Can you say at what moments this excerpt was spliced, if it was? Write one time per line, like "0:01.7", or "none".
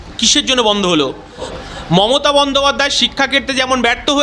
0:01.5